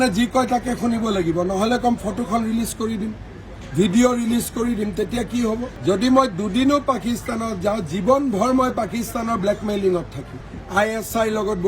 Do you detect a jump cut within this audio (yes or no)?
yes